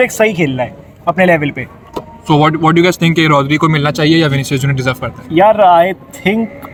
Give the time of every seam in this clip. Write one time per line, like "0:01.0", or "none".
none